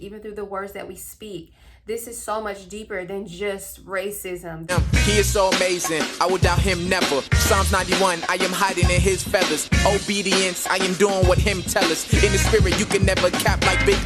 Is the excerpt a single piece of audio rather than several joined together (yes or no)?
no